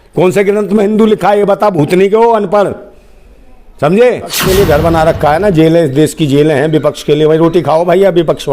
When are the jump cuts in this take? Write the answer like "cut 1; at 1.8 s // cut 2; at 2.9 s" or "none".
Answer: cut 1; at 4.4 s